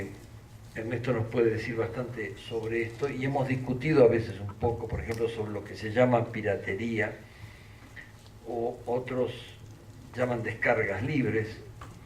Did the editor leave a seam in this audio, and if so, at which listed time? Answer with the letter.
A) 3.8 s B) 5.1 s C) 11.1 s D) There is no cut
A